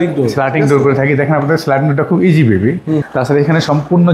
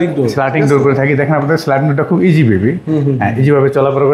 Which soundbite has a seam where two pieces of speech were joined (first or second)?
first